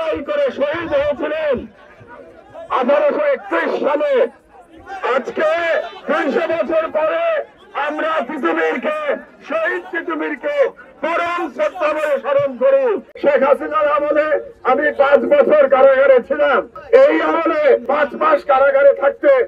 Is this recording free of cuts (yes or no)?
no